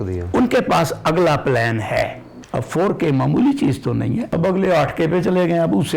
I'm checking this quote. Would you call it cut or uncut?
cut